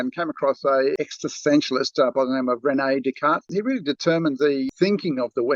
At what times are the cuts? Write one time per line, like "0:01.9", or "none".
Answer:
0:00.9
0:03.4
0:04.7